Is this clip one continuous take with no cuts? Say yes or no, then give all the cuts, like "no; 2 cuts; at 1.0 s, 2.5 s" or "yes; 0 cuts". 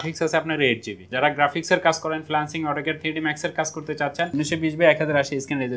no; 2 cuts; at 1.0 s, 4.3 s